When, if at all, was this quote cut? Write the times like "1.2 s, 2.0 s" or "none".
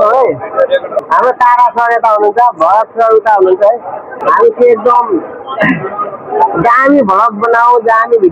1.0 s, 4.1 s